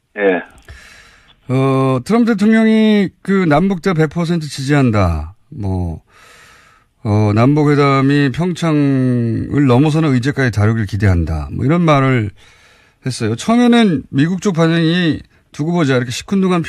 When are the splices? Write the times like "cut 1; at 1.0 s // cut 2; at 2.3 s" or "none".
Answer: cut 1; at 10.4 s